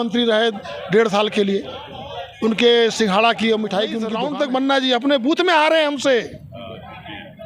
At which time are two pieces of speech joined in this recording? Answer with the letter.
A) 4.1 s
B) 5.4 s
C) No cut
A